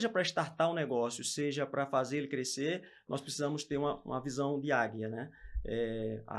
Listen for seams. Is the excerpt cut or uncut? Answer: uncut